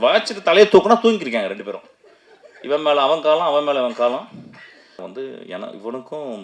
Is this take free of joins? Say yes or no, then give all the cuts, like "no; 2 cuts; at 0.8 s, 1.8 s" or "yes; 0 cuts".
no; 1 cut; at 5.0 s